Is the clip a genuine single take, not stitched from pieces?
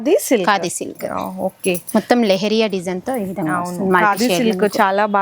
yes; 0 cuts

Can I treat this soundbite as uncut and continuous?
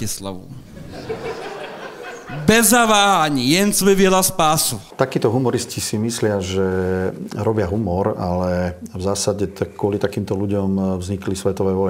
no; 1 cut; at 4.9 s

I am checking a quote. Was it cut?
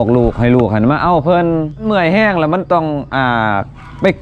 yes; 1 cut; at 1.8 s

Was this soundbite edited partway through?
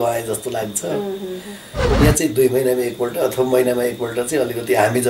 yes; 1 cut; at 1.8 s

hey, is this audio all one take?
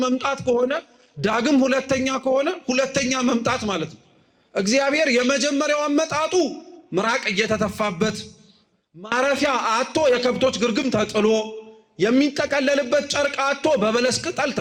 yes; 0 cuts

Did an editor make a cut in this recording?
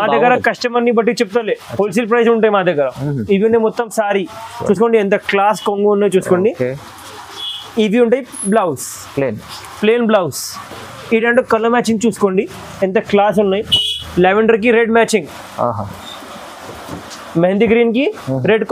no; 0 cuts

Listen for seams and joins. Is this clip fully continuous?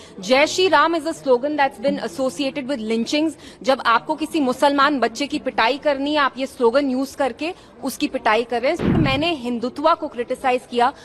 no; 1 cut; at 9.0 s

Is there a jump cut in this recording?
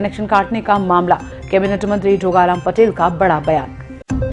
no; 0 cuts

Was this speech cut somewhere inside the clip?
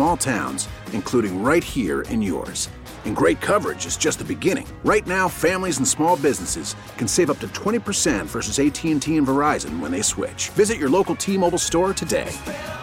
no; 0 cuts

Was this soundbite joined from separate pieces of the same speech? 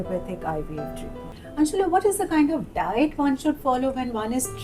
yes; 1 cut; at 1.2 s

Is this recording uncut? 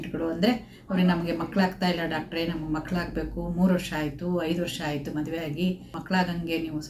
no; 1 cut; at 5.9 s

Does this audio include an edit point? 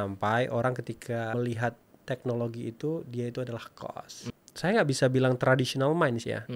yes; 2 cuts; at 1.3 s, 4.3 s

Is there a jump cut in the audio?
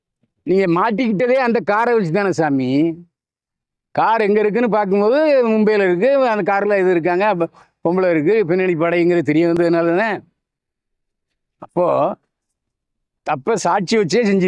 no; 0 cuts

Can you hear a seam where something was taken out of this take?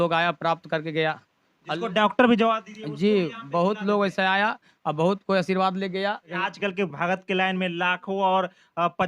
yes; 1 cut; at 6.4 s

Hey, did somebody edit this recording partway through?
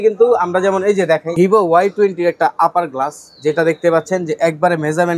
yes; 1 cut; at 1.3 s

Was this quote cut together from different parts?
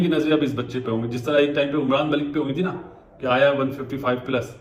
no; 0 cuts

